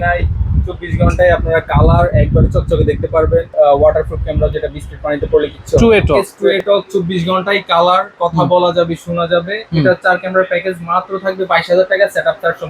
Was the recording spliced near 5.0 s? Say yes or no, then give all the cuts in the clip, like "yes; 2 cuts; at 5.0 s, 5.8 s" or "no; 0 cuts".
no; 2 cuts; at 3.5 s, 6.3 s